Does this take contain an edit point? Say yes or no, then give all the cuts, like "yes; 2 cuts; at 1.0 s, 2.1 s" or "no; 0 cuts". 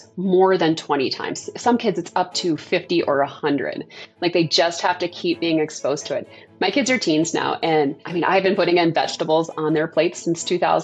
no; 0 cuts